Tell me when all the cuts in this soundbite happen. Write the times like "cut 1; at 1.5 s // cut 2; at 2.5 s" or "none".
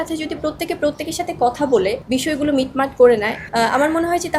cut 1; at 2.0 s // cut 2; at 3.4 s